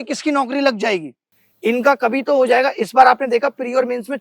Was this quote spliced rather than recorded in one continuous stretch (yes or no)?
yes